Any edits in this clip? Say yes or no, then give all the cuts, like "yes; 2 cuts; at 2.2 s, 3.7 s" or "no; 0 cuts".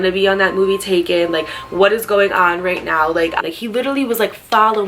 yes; 1 cut; at 3.4 s